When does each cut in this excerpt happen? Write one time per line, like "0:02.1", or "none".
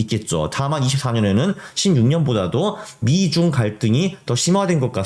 none